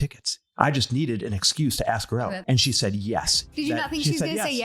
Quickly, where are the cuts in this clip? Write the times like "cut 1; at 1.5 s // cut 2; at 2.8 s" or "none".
cut 1; at 2.4 s // cut 2; at 3.5 s